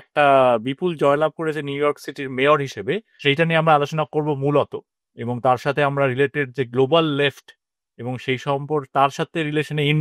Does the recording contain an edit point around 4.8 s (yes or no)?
no